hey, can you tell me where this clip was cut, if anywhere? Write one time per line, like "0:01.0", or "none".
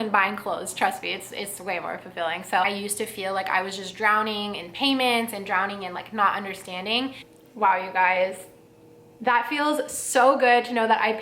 0:02.7
0:07.2